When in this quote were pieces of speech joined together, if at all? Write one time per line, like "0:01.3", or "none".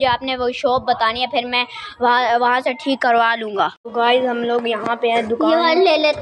0:03.8

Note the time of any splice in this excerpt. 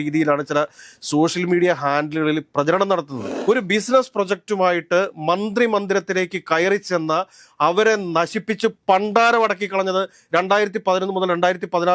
0:03.2

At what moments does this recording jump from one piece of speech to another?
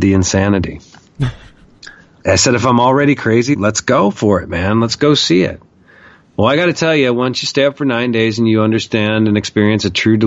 0:02.2
0:03.6

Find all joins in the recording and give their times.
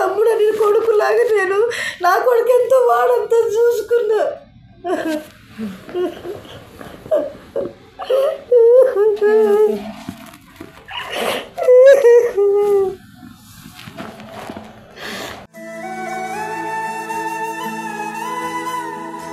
none

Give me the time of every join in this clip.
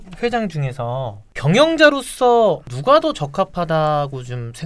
0:01.2
0:02.7

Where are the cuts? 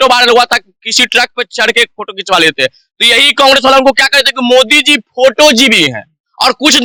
none

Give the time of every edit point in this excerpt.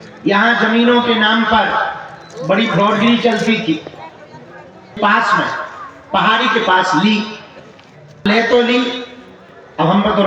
0:04.9
0:08.2

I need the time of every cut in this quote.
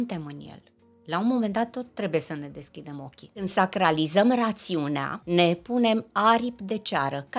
0:03.5
0:05.1

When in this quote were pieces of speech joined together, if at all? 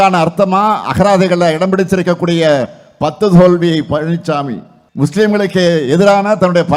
0:05.1

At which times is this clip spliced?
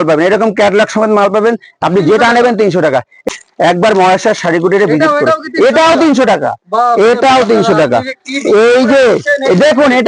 0:03.2

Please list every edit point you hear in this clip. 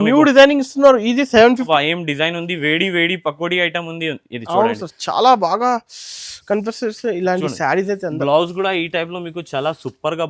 0:01.7

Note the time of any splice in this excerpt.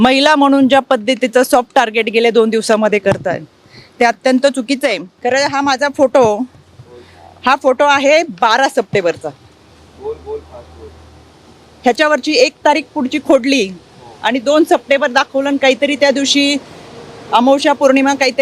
0:05.1

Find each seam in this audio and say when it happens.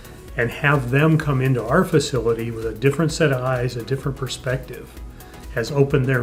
none

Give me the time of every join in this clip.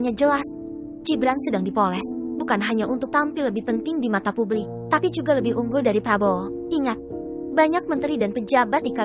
none

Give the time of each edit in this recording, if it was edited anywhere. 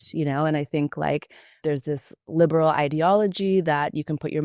0:01.5

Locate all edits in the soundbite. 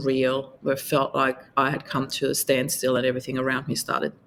none

